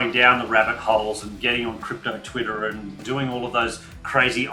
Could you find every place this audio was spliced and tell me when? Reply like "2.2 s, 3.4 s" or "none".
2.9 s